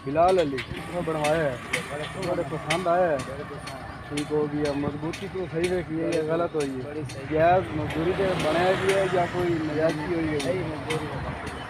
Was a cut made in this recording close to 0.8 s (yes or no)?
yes